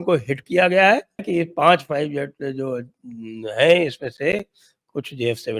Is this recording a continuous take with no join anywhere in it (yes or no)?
yes